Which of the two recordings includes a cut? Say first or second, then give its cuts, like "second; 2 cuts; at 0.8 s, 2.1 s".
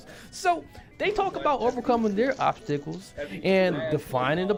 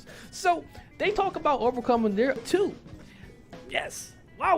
second; 1 cut; at 2.4 s